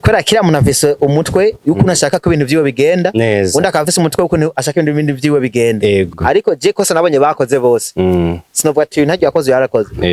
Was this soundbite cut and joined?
yes; 1 cut; at 6.2 s

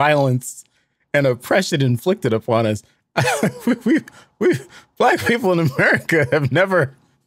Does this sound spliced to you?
no; 0 cuts

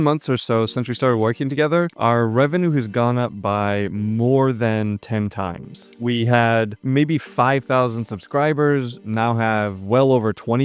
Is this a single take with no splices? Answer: yes; 0 cuts

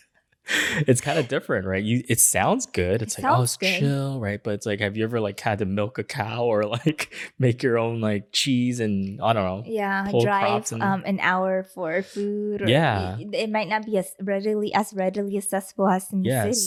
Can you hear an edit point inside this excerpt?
no; 0 cuts

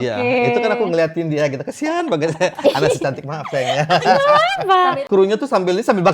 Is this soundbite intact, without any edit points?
no; 1 cut; at 5.0 s

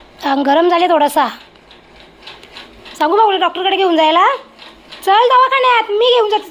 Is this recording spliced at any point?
no; 0 cuts

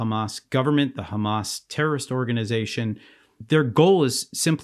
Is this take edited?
yes; 1 cut; at 3.3 s

